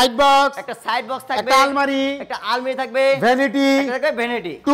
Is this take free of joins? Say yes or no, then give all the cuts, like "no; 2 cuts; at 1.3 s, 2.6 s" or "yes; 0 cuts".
yes; 0 cuts